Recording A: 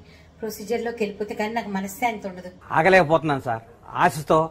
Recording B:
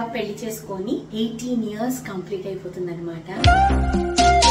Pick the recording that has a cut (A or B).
B